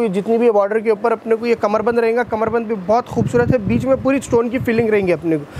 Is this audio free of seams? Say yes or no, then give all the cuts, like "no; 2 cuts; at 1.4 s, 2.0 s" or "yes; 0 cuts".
yes; 0 cuts